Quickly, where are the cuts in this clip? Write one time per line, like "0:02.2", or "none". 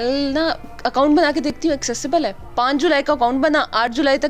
0:02.4